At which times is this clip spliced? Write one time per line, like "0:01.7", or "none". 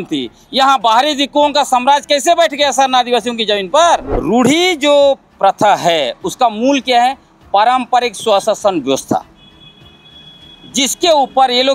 0:04.1